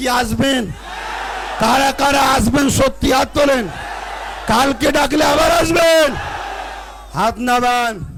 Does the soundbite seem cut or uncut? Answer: uncut